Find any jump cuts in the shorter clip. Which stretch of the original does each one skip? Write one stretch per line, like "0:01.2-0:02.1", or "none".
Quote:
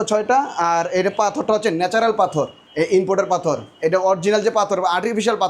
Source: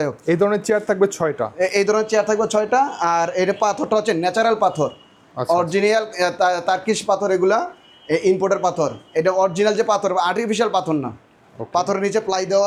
0:05.0-0:07.9

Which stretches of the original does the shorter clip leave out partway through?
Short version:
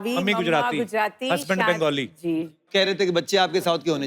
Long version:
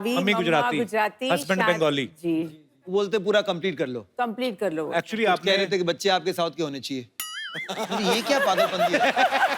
0:02.7-0:05.4

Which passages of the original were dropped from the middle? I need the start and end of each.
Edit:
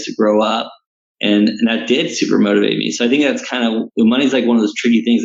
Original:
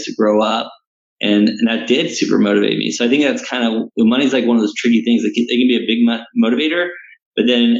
none

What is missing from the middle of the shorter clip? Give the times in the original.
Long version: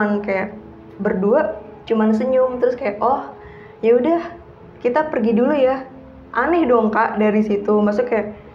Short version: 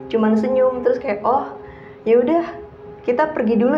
none

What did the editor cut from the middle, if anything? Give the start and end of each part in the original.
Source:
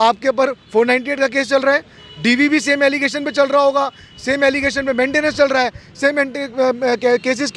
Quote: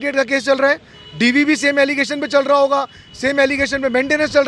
none

